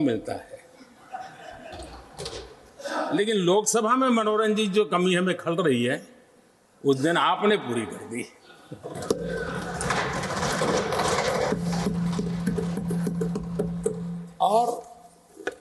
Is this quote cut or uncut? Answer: uncut